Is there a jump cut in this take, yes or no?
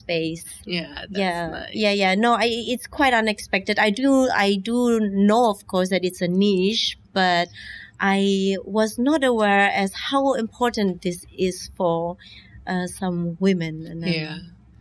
no